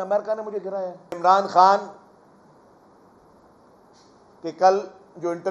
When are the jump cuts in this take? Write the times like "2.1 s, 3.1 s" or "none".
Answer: 1.2 s